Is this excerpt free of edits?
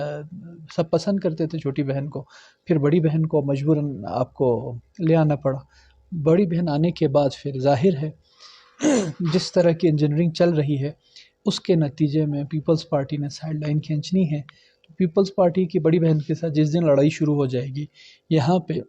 yes; 0 cuts

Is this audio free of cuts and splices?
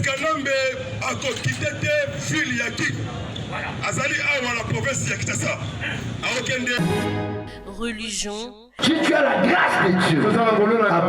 no; 1 cut; at 6.8 s

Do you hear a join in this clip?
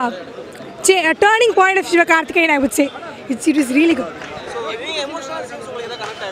no; 0 cuts

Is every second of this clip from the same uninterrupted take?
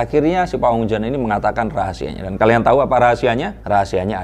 yes; 0 cuts

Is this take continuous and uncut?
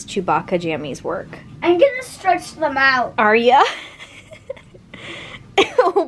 yes; 0 cuts

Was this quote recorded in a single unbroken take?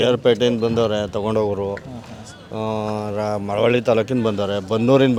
yes; 0 cuts

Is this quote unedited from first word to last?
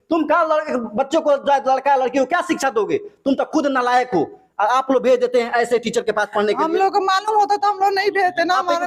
yes; 0 cuts

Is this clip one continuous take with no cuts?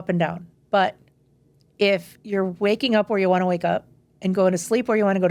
yes; 0 cuts

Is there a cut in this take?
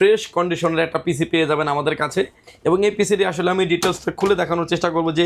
no; 0 cuts

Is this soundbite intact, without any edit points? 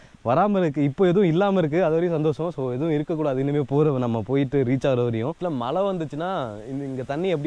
no; 1 cut; at 5.4 s

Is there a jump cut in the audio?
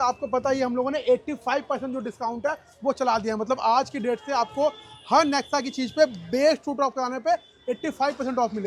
no; 0 cuts

